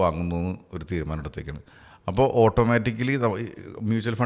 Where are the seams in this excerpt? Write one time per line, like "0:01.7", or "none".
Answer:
none